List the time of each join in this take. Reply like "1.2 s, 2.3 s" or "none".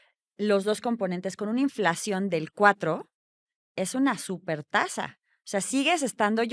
none